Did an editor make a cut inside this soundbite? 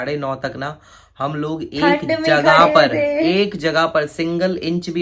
no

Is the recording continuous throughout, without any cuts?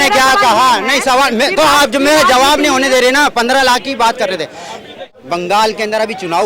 no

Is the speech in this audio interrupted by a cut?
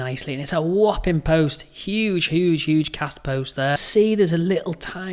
yes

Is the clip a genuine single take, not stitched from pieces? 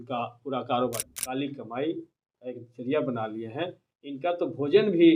no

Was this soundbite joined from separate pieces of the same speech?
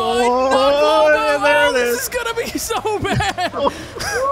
no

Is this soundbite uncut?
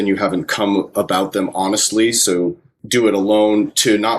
no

